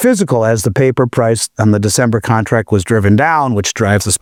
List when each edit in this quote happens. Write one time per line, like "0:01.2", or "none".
none